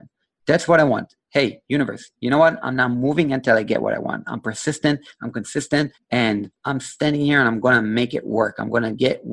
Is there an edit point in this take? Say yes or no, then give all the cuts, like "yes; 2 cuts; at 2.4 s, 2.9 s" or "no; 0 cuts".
yes; 2 cuts; at 6.0 s, 6.6 s